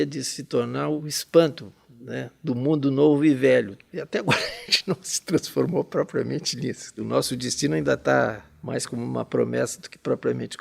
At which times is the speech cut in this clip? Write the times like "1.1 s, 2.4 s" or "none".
1.0 s, 3.8 s, 7.0 s, 8.5 s